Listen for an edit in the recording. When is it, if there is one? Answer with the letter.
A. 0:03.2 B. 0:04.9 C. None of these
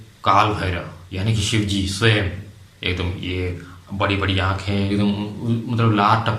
B